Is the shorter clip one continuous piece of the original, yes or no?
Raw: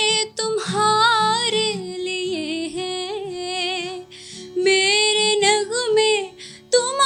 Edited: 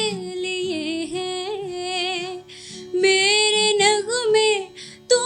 yes